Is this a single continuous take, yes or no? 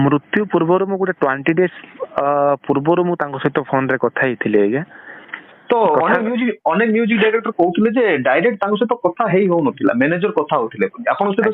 yes